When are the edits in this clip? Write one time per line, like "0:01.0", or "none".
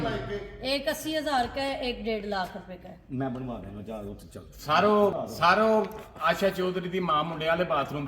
0:05.2